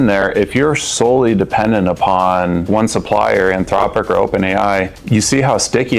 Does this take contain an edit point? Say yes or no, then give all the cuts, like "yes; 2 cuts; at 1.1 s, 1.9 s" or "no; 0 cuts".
yes; 2 cuts; at 2.7 s, 5.0 s